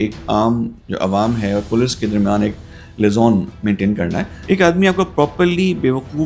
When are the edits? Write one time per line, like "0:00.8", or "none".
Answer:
0:04.3